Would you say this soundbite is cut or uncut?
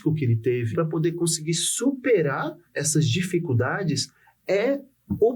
cut